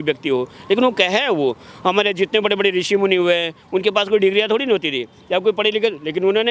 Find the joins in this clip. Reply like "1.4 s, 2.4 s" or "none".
none